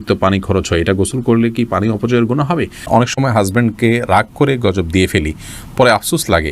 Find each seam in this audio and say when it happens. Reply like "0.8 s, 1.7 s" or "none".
2.9 s